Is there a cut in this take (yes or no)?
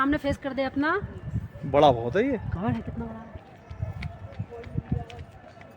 no